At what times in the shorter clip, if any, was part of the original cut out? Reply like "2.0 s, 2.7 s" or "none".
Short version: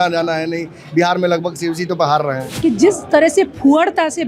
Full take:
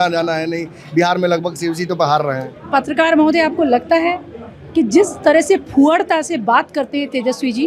2.4 s